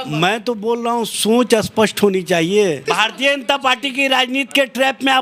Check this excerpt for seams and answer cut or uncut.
cut